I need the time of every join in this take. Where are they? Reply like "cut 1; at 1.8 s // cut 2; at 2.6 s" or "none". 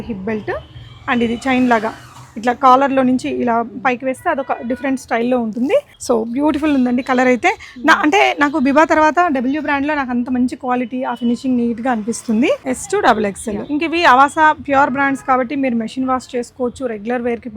cut 1; at 5.9 s // cut 2; at 12.6 s